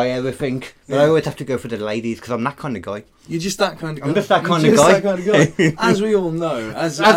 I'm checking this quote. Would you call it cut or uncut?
uncut